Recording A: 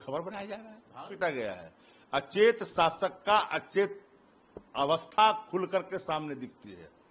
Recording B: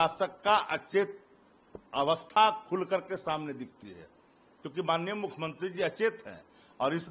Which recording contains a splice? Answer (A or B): A